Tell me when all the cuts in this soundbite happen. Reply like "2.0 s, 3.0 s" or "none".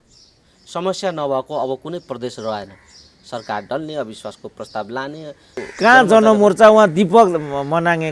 5.7 s